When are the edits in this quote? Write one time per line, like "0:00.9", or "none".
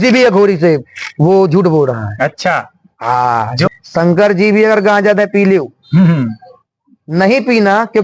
0:03.7